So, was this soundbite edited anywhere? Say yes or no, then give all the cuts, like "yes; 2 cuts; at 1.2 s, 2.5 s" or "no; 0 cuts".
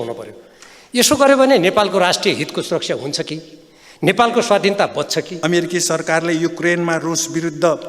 yes; 1 cut; at 5.3 s